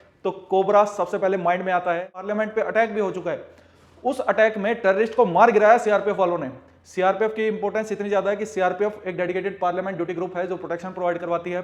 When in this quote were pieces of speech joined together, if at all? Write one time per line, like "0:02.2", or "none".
0:02.3